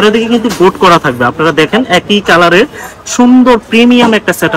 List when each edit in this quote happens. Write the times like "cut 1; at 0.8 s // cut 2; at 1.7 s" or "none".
none